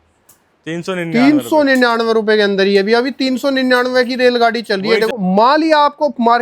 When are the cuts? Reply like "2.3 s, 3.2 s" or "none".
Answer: 5.1 s